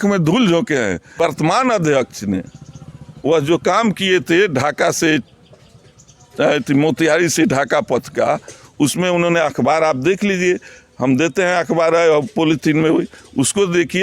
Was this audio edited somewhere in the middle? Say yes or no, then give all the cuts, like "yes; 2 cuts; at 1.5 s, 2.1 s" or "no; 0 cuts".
yes; 1 cut; at 1.1 s